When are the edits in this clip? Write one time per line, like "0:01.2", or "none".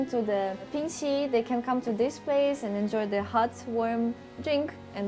none